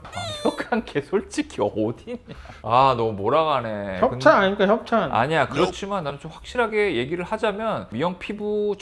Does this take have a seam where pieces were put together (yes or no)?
no